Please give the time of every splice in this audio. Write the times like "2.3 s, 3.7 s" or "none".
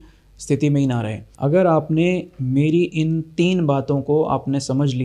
1.2 s